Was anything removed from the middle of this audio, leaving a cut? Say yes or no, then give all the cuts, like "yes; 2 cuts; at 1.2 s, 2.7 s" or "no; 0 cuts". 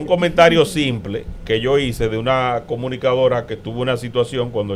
no; 0 cuts